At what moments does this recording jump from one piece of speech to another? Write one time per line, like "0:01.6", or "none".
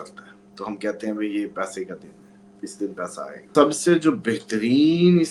0:03.4